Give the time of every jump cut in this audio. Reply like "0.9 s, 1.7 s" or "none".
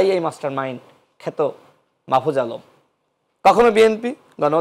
none